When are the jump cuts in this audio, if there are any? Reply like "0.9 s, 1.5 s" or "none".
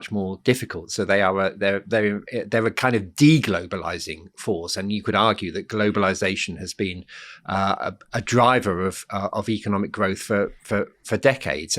none